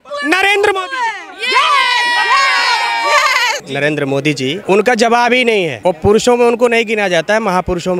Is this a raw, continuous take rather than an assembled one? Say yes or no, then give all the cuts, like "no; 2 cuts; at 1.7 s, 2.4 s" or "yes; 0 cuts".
no; 3 cuts; at 3.7 s, 4.6 s, 5.7 s